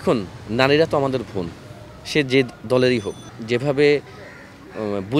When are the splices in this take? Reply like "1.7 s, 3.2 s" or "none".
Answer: 3.2 s